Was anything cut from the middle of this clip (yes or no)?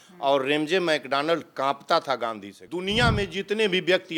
yes